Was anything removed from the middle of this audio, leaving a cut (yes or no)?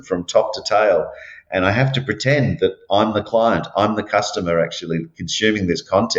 no